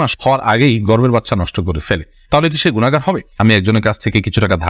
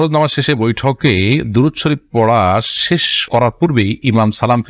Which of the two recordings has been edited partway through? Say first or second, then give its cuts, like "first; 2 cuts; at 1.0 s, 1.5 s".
first; 1 cut; at 3.4 s